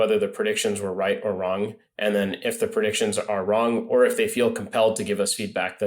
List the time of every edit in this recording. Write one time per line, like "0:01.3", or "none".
none